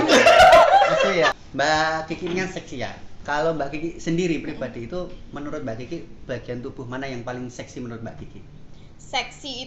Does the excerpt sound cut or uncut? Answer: cut